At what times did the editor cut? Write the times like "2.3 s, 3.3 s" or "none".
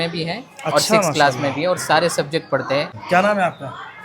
3.0 s